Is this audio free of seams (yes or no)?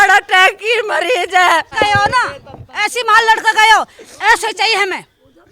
no